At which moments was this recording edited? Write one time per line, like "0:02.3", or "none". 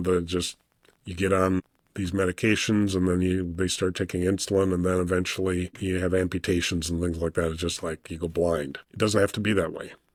none